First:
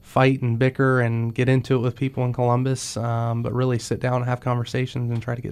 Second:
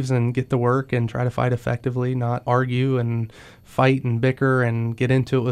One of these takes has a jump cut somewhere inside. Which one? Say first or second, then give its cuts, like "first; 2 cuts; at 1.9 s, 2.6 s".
second; 1 cut; at 2.4 s